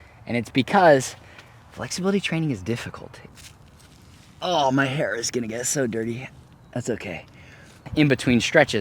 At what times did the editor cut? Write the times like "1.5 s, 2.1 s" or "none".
3.1 s, 7.9 s